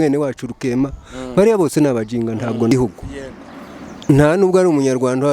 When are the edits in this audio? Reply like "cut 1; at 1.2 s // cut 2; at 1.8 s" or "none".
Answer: cut 1; at 2.7 s